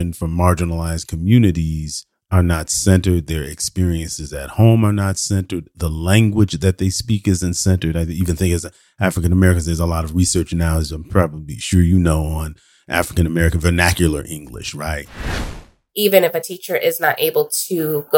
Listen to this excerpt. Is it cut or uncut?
cut